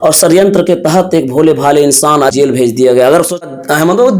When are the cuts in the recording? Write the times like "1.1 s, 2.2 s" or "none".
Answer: 2.3 s, 3.4 s